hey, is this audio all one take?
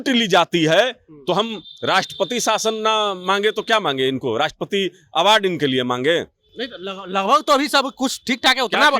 yes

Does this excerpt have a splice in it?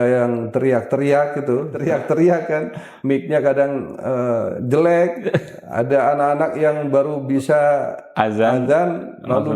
yes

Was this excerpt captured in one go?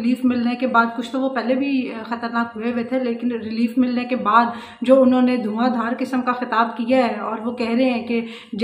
yes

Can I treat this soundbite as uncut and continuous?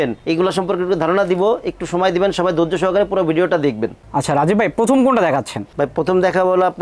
yes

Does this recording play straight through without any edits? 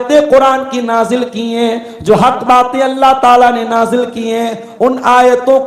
yes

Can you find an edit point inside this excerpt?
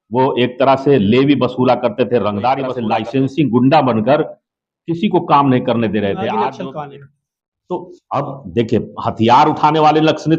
yes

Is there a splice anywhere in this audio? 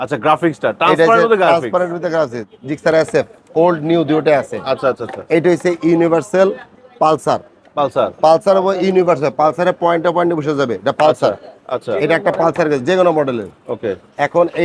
no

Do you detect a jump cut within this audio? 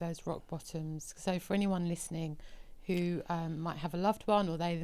no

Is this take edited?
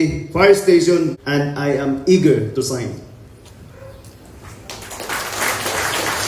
yes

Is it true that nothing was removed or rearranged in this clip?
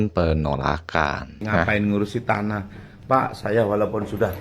no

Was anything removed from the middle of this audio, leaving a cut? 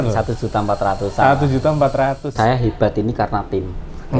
yes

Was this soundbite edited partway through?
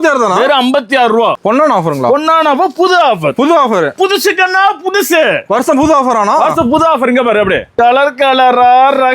yes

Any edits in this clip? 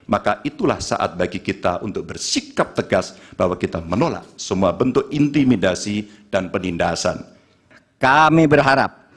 yes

